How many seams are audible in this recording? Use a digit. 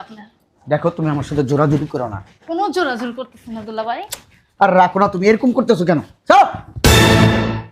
1